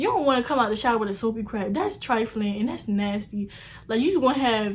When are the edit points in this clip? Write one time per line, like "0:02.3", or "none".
none